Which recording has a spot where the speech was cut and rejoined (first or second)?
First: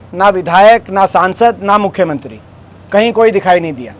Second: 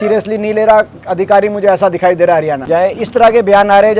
second